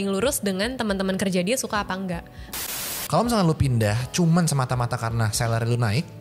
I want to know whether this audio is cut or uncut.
cut